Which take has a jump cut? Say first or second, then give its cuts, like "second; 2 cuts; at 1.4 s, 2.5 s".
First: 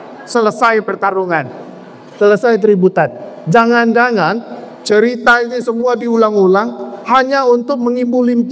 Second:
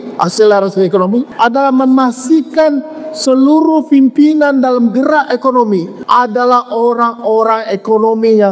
second; 2 cuts; at 1.3 s, 5.9 s